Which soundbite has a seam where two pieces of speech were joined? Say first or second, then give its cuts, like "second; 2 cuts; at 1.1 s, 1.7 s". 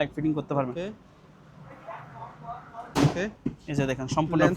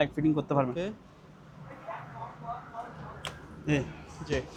first; 1 cut; at 2.9 s